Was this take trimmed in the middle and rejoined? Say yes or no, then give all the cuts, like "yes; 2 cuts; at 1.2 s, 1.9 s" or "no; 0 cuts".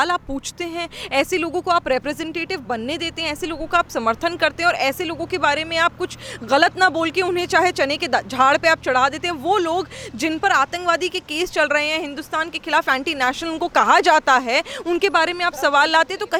no; 0 cuts